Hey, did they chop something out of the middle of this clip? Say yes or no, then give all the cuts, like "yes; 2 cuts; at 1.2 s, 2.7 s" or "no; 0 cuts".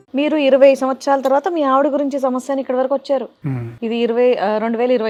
no; 0 cuts